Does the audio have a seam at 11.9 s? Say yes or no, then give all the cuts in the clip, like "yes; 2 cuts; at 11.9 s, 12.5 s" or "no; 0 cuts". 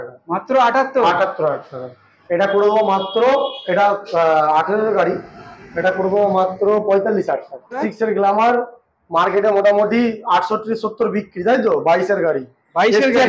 no; 2 cuts; at 2.1 s, 7.8 s